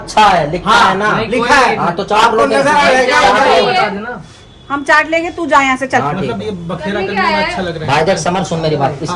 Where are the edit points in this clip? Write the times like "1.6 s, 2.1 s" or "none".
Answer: none